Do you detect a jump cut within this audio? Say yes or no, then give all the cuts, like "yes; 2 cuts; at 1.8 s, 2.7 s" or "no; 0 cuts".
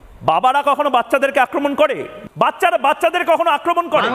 yes; 1 cut; at 2.1 s